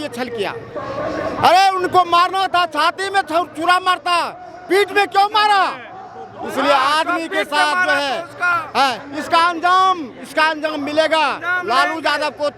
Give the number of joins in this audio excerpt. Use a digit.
0